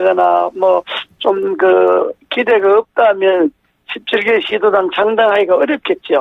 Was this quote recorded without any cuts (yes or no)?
no